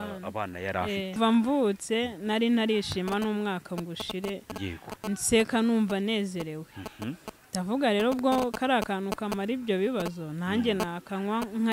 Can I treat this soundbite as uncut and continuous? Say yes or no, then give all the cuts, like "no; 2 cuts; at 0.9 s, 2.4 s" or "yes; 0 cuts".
no; 1 cut; at 1.1 s